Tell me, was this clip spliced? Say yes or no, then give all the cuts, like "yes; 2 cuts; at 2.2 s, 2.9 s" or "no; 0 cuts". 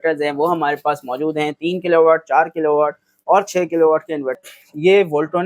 yes; 1 cut; at 4.4 s